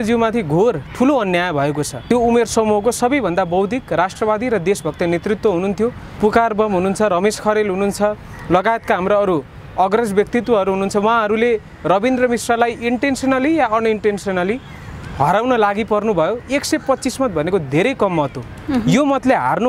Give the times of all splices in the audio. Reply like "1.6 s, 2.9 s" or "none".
1.9 s, 6.1 s